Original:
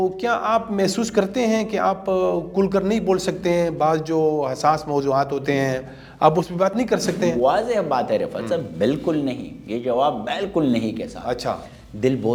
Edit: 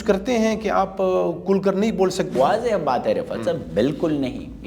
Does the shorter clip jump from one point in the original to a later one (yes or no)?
yes